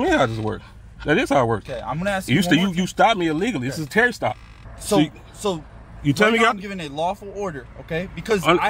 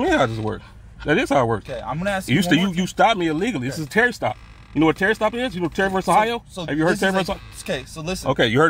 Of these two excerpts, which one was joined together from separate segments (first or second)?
first